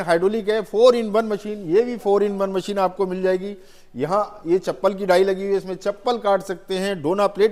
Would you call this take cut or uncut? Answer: uncut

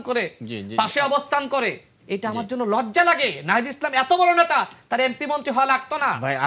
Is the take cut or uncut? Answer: uncut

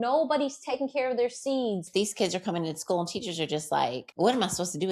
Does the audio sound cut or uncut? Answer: cut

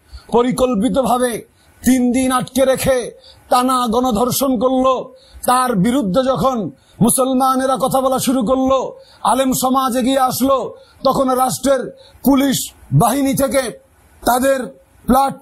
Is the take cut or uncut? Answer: cut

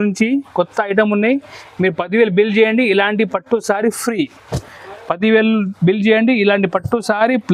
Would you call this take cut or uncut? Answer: uncut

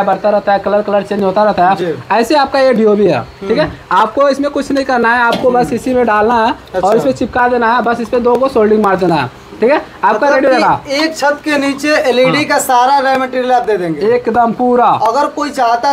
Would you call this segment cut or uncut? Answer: uncut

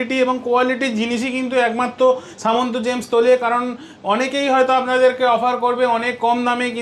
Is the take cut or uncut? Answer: uncut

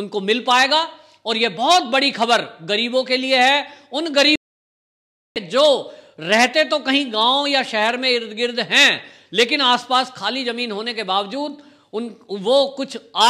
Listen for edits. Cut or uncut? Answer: uncut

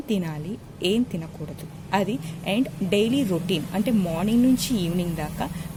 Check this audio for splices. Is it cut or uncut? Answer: uncut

